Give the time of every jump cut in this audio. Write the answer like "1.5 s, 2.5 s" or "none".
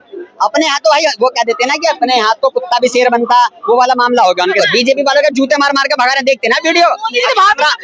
4.6 s